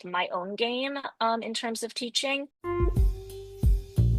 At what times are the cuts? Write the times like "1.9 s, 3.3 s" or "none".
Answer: 2.6 s